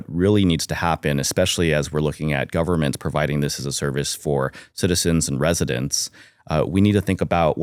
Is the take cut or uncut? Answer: uncut